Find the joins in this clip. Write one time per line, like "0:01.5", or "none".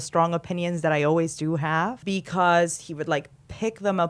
0:02.0

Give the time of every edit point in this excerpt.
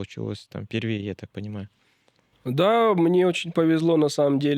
none

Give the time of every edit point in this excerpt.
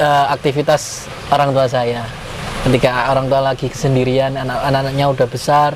none

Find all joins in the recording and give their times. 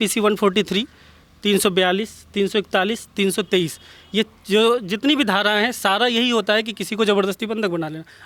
none

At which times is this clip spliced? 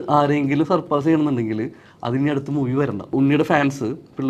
0:03.1

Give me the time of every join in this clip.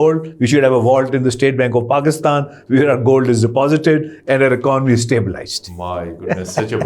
none

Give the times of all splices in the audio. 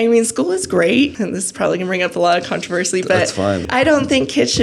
0:01.2
0:03.6

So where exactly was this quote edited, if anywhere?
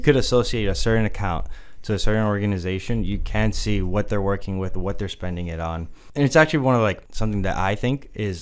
0:06.0
0:07.1

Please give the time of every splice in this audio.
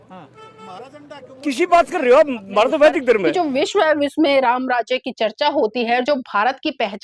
0:03.3

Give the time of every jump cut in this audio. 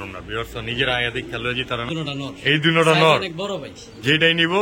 0:01.9

